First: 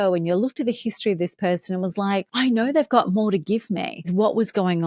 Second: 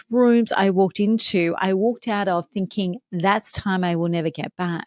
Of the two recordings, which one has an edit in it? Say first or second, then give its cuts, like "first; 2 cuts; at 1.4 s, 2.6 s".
first; 1 cut; at 3.9 s